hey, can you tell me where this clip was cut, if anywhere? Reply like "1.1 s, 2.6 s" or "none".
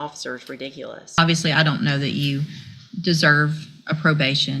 1.2 s